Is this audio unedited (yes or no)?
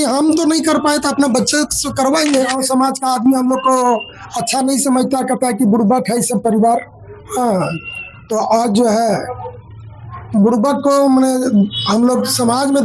no